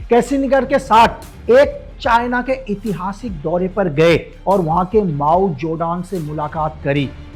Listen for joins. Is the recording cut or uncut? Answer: uncut